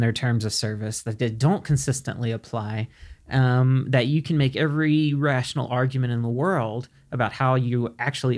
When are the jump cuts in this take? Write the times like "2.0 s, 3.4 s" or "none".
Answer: none